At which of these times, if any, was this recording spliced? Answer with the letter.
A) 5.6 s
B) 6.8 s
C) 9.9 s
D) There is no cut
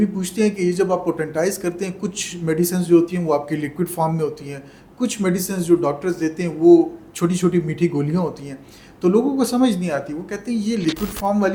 D